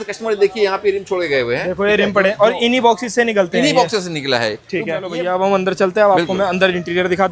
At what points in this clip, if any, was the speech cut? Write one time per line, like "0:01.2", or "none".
0:05.1

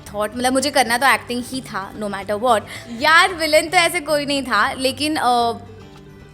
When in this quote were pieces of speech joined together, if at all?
0:02.8

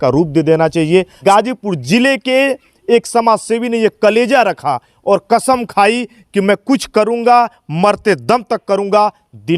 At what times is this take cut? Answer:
0:01.2

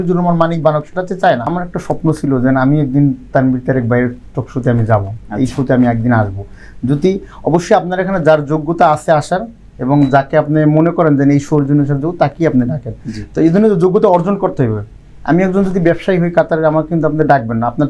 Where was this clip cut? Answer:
0:01.4

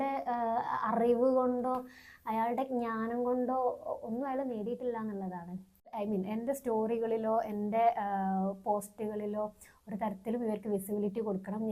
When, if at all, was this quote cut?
0:05.9

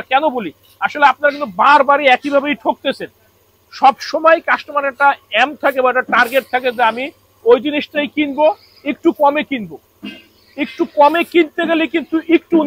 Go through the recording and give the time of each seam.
none

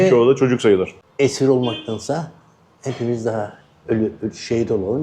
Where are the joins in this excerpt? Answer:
0:01.0

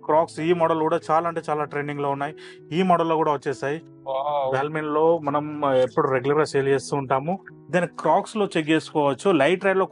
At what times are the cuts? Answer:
0:03.9
0:07.5

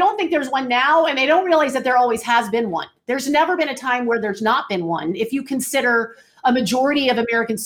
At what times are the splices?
none

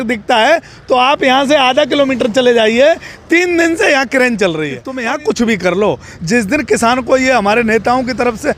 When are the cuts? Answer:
0:04.9

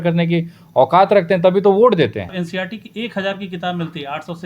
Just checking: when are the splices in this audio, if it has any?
0:02.3

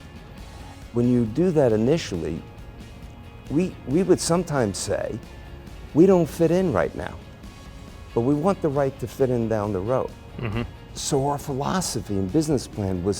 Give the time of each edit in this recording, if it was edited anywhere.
0:10.8

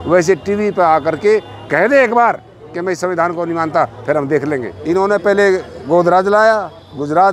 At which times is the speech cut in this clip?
0:04.7

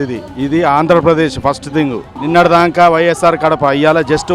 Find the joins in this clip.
0:02.1

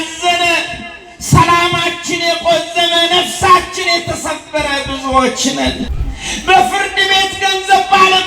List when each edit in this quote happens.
0:05.9

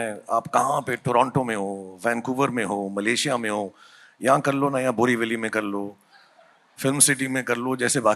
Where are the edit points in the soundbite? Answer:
none

